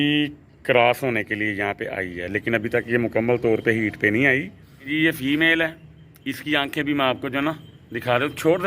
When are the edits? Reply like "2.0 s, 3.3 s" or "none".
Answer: 4.9 s